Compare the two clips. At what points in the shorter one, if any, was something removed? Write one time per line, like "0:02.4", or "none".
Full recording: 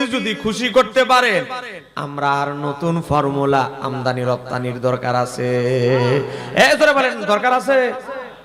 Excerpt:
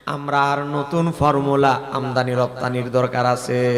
none

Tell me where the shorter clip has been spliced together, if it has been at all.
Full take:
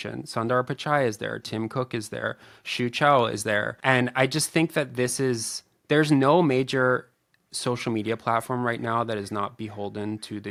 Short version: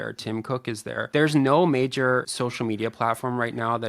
0:00.9
0:02.3

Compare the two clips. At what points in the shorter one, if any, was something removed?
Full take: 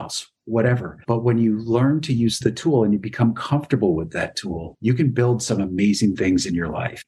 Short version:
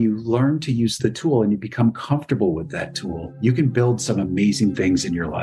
none

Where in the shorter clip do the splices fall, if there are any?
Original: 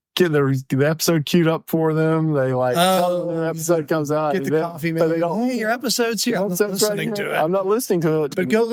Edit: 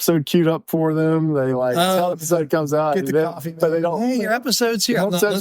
0:02.2

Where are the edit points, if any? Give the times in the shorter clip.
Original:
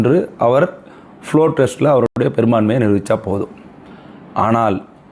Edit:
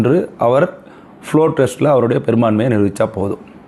0:02.1

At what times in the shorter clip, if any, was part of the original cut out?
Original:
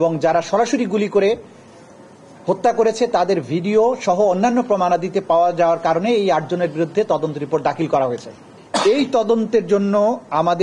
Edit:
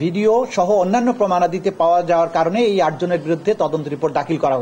none

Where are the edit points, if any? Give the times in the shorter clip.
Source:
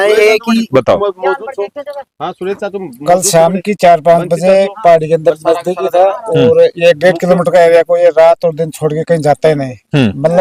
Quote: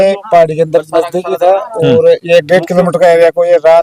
none

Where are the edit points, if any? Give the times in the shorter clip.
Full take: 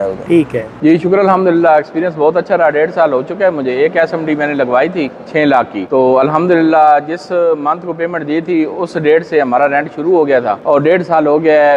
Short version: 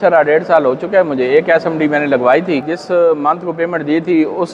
0:02.7

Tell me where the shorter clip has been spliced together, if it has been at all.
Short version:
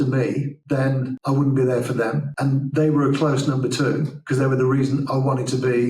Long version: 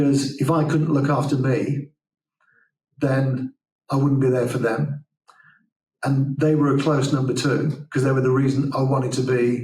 0:01.0
0:02.3

